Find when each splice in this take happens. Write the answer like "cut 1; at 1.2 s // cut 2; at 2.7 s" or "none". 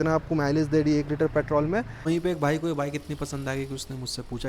cut 1; at 2.1 s